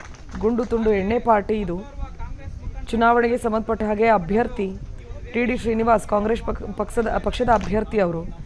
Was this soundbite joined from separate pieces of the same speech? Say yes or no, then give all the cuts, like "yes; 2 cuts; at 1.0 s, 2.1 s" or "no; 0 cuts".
yes; 1 cut; at 5.1 s